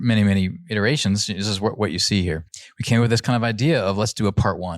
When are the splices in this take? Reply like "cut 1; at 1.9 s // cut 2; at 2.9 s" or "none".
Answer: cut 1; at 2.4 s